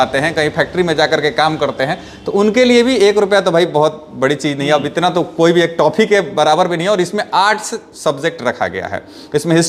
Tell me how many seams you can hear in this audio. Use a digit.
0